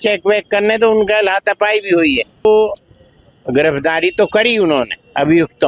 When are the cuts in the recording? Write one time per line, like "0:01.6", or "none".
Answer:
0:02.4